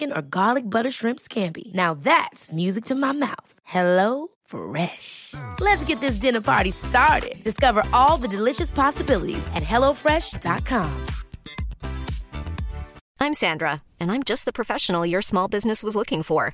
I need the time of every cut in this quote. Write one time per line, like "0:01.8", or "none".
0:13.0